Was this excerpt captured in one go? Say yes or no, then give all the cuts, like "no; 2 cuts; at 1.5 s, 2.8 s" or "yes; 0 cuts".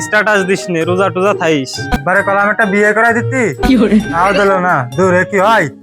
no; 1 cut; at 1.9 s